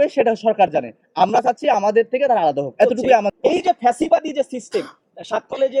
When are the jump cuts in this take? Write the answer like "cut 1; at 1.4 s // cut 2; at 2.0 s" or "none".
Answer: cut 1; at 3.3 s